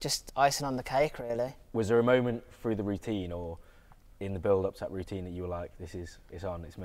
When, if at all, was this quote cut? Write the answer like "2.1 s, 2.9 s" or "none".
none